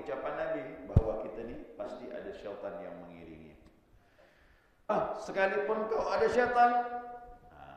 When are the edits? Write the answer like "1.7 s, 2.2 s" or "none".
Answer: 4.9 s